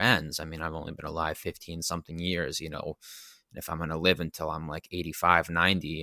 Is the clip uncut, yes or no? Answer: yes